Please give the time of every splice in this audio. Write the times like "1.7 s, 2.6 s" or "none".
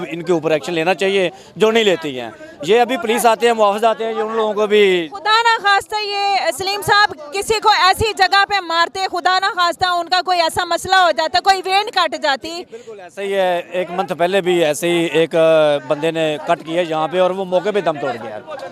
none